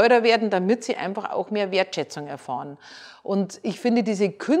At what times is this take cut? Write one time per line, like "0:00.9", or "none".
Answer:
none